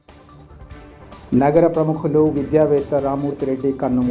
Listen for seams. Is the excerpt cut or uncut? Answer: cut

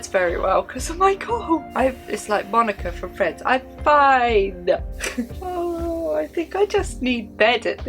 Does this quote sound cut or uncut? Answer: cut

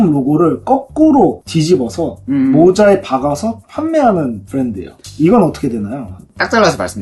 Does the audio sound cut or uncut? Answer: uncut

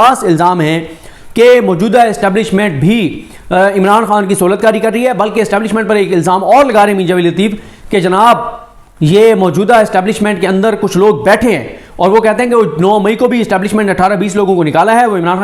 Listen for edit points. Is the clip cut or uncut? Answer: uncut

